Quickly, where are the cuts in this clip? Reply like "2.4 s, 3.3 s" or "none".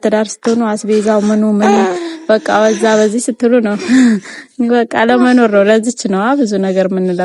none